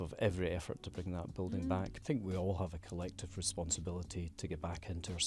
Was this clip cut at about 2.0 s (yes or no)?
yes